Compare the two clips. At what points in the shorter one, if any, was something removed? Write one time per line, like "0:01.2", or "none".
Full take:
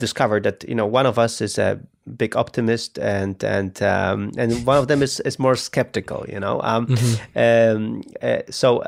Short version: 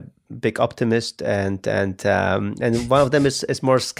none